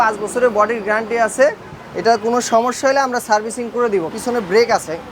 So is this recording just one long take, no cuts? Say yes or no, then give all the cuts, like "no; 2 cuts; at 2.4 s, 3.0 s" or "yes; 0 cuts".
no; 1 cut; at 4.1 s